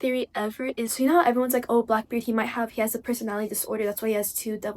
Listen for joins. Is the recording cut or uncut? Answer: cut